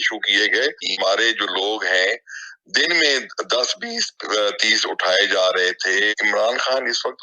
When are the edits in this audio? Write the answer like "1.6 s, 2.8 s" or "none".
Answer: 0.8 s, 6.1 s

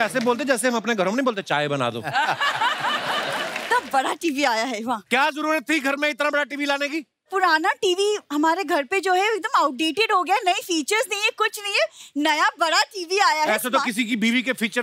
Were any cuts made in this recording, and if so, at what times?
3.6 s

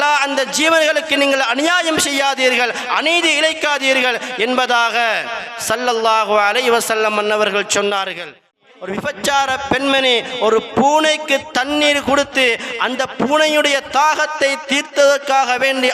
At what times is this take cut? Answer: 8.6 s

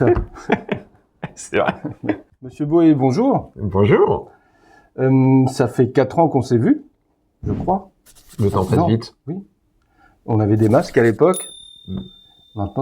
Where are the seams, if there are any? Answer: 2.5 s

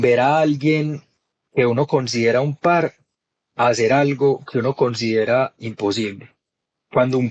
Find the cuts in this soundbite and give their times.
none

